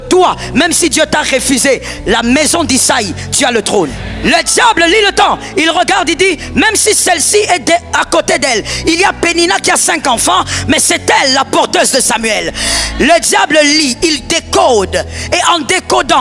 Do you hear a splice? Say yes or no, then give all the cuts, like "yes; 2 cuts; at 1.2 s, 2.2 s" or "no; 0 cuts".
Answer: yes; 1 cut; at 4.1 s